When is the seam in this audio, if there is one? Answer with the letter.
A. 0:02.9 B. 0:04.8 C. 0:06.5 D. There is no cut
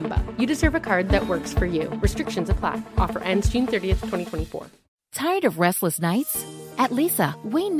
B